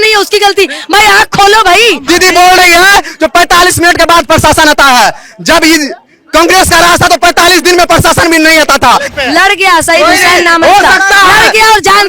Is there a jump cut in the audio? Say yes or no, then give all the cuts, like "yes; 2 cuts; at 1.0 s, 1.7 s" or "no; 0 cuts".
yes; 2 cuts; at 2.0 s, 9.1 s